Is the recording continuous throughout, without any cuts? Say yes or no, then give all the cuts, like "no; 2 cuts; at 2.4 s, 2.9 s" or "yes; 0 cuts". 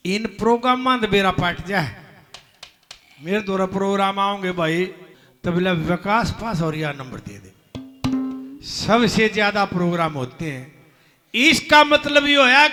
yes; 0 cuts